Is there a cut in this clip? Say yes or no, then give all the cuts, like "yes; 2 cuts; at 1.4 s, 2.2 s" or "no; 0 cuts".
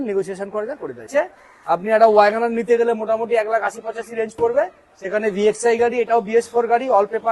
yes; 1 cut; at 1.1 s